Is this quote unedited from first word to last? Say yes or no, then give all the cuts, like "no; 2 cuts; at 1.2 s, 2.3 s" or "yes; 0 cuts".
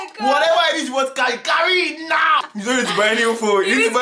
no; 1 cut; at 2.5 s